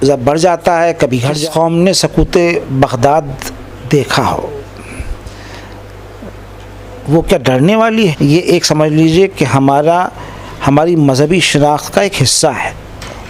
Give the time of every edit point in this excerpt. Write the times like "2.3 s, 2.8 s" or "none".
1.4 s, 8.1 s